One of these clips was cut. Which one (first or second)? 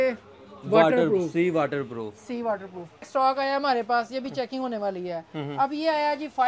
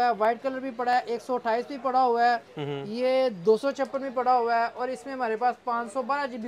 first